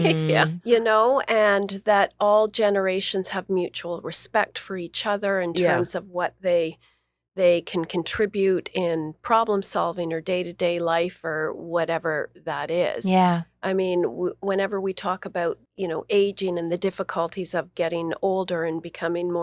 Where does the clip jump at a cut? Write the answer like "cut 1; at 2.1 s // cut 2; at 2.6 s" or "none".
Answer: cut 1; at 15.7 s